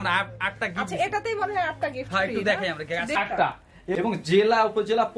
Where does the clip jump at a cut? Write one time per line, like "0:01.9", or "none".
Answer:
0:03.3